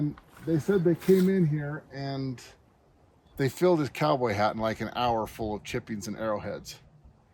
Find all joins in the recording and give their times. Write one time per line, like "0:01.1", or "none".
none

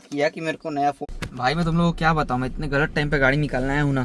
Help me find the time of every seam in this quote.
0:01.0

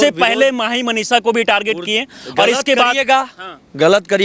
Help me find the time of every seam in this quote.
none

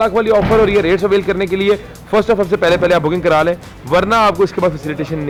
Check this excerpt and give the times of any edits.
none

